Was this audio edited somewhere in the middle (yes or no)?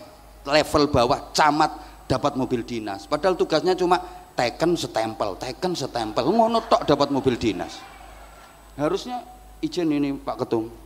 no